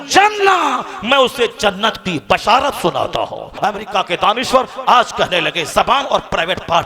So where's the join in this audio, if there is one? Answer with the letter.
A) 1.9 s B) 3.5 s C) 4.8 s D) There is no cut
B